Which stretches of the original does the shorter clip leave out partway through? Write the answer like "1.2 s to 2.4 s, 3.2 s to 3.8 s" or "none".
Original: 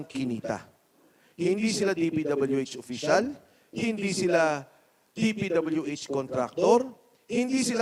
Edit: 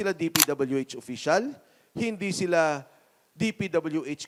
none